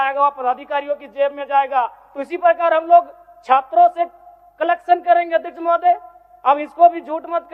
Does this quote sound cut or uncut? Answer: uncut